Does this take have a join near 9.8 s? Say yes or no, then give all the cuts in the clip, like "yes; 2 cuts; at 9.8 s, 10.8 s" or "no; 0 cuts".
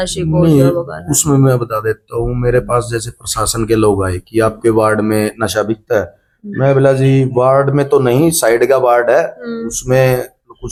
no; 0 cuts